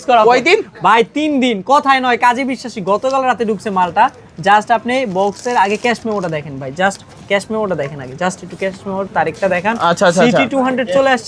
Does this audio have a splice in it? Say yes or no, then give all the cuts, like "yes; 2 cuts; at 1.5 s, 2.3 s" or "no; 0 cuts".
no; 0 cuts